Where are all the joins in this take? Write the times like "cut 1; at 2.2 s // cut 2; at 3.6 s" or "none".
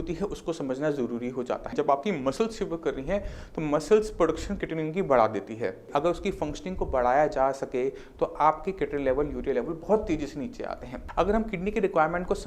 cut 1; at 1.7 s // cut 2; at 5.9 s // cut 3; at 10.9 s